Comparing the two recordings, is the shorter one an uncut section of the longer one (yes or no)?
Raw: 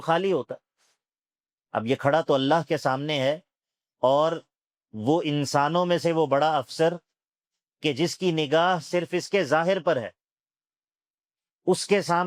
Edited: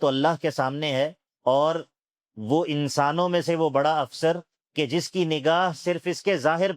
no